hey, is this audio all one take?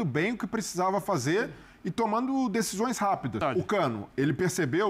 no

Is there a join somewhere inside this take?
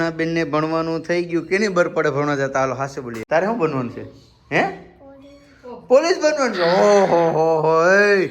yes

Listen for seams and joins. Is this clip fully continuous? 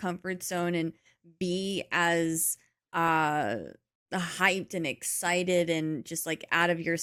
yes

